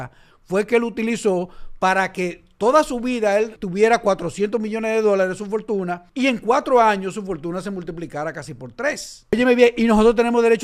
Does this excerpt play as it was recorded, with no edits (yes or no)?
no